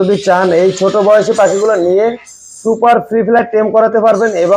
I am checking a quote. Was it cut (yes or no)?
no